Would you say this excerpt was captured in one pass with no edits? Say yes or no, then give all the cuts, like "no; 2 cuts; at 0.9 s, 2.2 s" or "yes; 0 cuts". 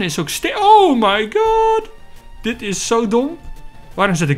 yes; 0 cuts